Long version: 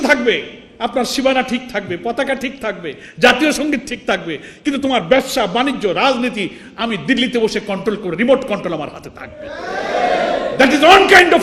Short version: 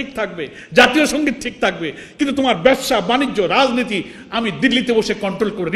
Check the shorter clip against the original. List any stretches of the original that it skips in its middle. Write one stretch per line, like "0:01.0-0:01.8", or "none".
none